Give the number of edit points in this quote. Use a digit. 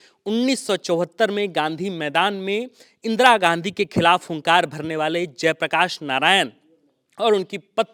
0